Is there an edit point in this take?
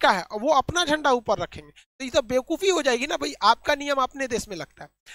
no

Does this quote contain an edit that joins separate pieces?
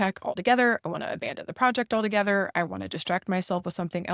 no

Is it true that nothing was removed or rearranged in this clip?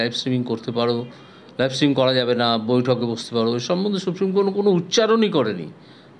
yes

